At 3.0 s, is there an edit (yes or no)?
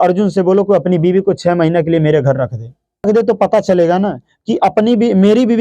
yes